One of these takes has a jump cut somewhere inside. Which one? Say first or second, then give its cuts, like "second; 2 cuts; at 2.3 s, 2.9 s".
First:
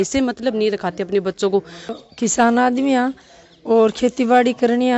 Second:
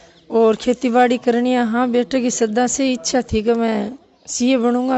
first; 1 cut; at 1.9 s